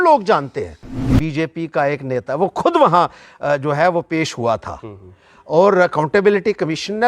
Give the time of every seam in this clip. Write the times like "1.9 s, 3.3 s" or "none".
1.2 s